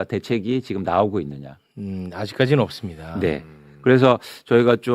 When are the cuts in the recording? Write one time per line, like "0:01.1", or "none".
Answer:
none

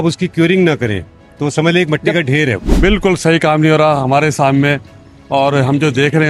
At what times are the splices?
0:02.6

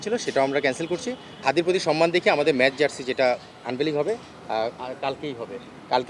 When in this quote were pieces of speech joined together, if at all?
0:01.4

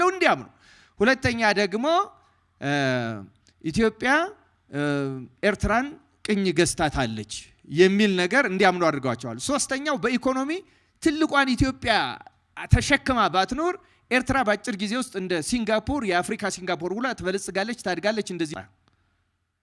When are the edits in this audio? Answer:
0:18.5

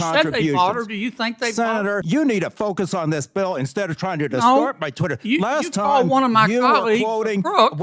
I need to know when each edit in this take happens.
0:02.0

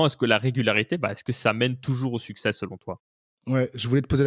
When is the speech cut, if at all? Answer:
none

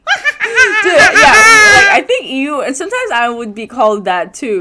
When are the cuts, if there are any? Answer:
none

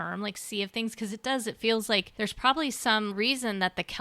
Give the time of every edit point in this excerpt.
0:02.1

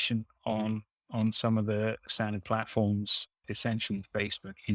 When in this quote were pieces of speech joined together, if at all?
0:02.1
0:03.4

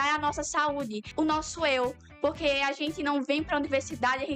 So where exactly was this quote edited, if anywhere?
0:01.0

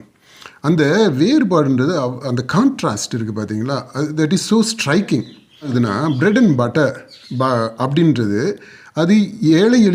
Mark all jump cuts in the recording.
0:05.7

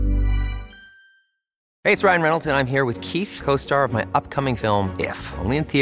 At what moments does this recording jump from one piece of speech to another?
0:01.6

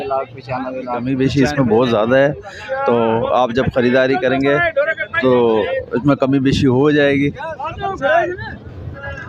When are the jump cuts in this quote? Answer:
0:01.0

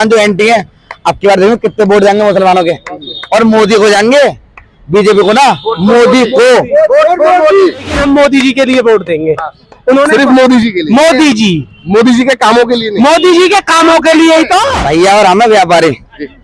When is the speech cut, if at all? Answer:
0:08.0
0:14.7

